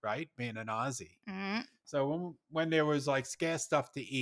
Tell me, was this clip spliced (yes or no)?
no